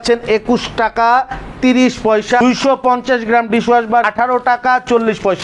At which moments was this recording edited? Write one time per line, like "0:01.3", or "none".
0:02.4
0:04.1